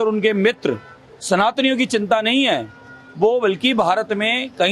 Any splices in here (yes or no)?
no